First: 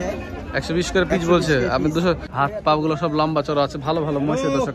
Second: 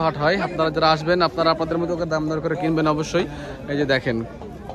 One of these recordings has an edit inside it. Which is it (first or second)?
first